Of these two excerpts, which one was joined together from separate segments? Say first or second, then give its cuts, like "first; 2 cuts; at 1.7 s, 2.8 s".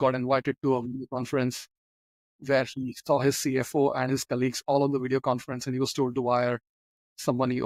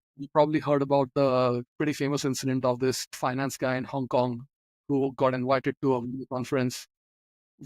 second; 2 cuts; at 1.7 s, 3.2 s